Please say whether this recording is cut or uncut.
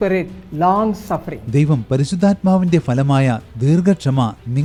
uncut